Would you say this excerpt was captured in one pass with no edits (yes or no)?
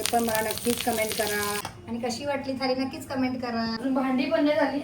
no